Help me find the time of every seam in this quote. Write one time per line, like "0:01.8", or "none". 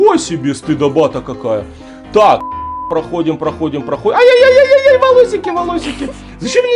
0:02.8